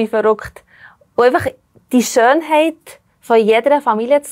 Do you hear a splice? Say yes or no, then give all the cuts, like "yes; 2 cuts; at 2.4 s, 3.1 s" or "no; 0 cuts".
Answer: no; 0 cuts